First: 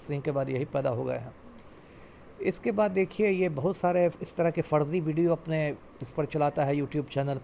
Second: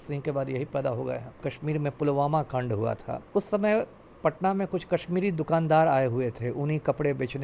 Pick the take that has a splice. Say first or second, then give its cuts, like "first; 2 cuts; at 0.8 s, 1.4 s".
second; 2 cuts; at 1.5 s, 3.1 s